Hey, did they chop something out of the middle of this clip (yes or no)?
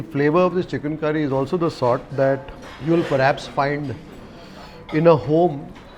no